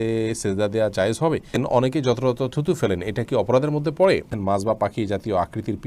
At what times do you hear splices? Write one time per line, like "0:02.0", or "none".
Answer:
0:01.6
0:04.3